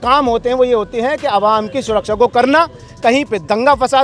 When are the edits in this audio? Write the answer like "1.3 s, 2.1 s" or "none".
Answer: none